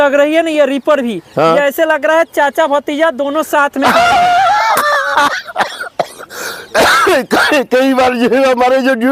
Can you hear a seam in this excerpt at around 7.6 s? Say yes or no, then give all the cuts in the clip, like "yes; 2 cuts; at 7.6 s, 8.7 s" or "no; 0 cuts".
no; 0 cuts